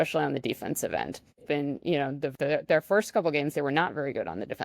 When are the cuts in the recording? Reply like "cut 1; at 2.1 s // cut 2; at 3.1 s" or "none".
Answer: cut 1; at 1.4 s // cut 2; at 2.3 s